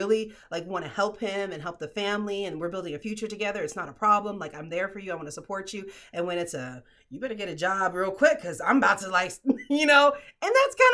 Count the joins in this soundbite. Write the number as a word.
zero